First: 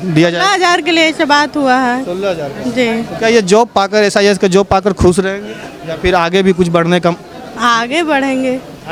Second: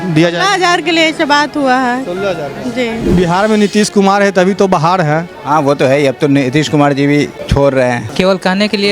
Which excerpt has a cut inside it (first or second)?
second